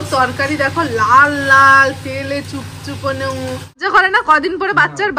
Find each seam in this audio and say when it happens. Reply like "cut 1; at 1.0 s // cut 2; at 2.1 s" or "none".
cut 1; at 3.8 s